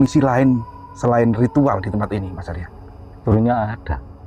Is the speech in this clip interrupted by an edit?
yes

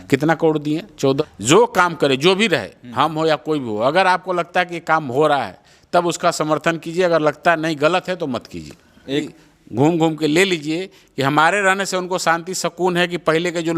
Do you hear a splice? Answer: yes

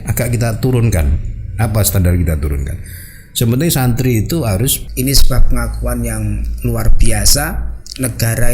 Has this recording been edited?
yes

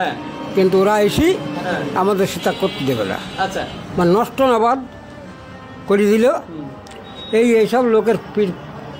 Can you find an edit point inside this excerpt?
no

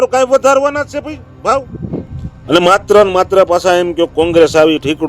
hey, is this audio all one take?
no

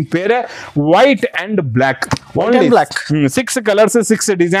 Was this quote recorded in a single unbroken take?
yes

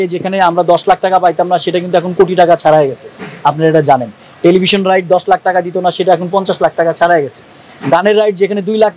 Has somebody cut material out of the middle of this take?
no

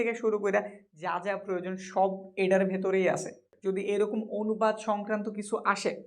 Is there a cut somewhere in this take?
yes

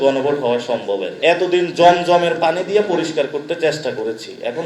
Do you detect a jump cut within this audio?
yes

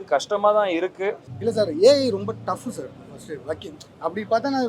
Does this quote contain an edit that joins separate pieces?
yes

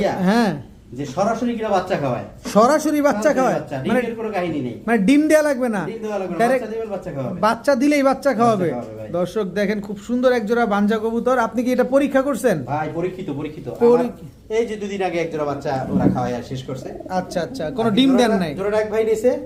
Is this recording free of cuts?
yes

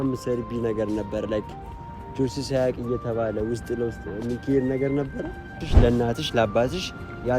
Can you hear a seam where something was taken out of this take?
yes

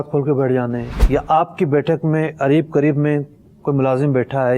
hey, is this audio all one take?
no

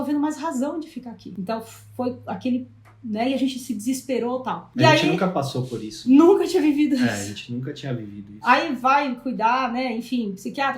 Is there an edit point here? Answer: yes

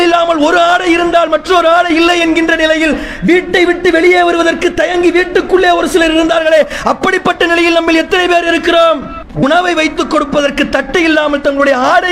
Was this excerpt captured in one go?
yes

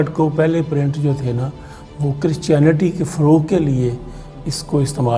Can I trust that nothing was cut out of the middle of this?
yes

